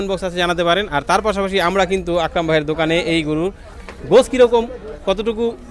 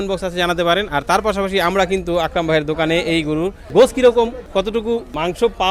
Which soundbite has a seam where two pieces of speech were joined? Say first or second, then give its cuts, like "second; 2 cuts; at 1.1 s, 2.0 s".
second; 2 cuts; at 3.6 s, 4.7 s